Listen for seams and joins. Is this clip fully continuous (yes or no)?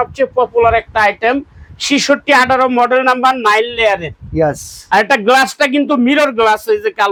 yes